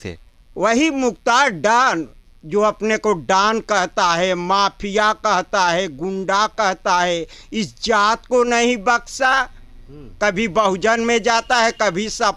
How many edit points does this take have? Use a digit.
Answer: 0